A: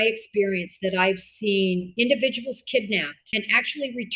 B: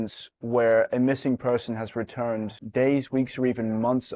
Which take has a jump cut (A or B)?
A